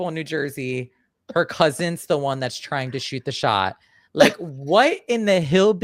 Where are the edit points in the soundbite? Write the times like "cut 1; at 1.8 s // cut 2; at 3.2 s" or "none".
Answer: none